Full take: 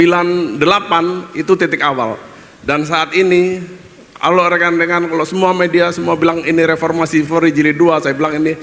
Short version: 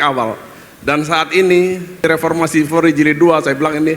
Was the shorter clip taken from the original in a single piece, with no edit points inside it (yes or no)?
no